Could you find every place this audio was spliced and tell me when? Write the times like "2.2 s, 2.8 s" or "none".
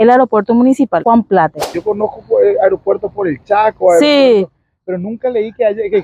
1.0 s, 1.7 s